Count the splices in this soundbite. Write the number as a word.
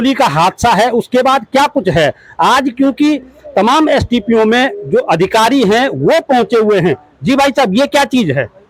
zero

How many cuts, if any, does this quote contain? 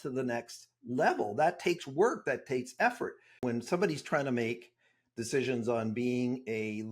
one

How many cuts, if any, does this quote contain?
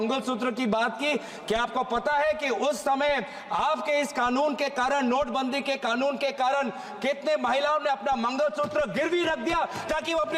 zero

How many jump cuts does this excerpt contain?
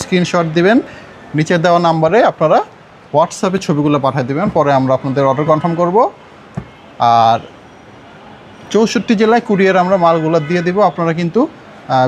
zero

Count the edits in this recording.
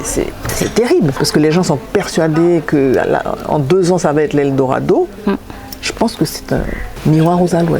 two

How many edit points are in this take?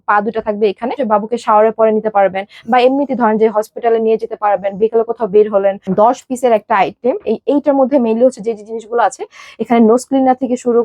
two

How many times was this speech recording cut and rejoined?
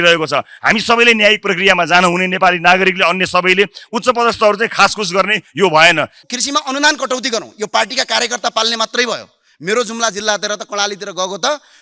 one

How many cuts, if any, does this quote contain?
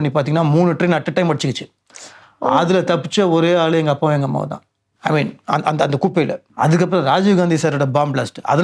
one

